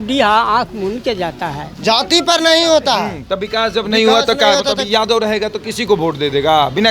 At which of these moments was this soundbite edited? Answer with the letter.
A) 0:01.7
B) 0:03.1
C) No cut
A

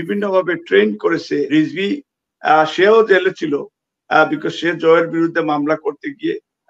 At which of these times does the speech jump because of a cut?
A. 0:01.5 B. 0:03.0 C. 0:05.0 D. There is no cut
A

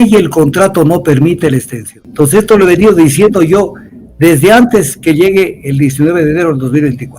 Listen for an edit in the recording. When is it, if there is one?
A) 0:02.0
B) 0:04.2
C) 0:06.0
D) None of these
A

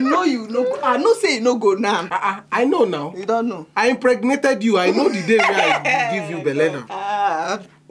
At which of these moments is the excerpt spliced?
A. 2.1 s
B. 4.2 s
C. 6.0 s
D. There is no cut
A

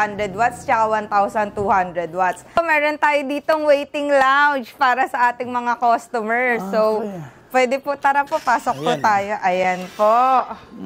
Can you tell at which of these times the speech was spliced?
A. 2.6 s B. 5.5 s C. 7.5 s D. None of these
A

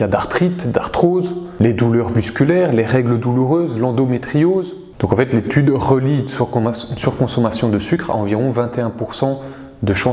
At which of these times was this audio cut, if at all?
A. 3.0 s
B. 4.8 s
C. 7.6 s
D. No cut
B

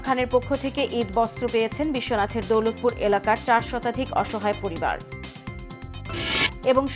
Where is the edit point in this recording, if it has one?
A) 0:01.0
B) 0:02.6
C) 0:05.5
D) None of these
D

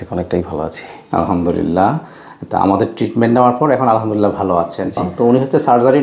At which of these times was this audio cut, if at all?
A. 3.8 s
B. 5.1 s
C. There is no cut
B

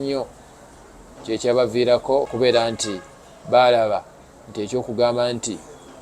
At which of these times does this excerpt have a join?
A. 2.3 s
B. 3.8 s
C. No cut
A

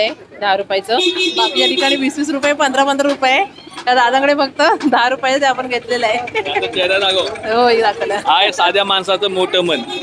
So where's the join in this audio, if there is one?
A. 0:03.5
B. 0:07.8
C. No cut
C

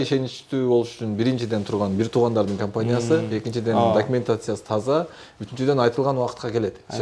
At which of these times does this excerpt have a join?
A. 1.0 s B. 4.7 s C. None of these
C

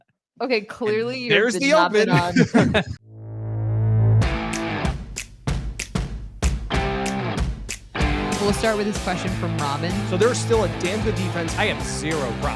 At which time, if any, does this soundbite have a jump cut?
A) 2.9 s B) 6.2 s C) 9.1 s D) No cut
A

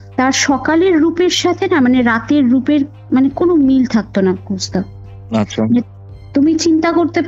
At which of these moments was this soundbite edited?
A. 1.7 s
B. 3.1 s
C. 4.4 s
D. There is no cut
D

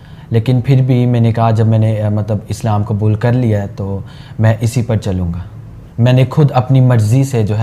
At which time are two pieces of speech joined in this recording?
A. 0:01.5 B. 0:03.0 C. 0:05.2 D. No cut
D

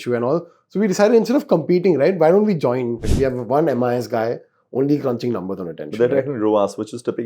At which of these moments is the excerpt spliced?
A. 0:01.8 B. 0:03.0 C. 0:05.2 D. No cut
B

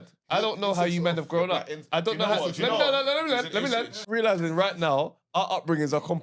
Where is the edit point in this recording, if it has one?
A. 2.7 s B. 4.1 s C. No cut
B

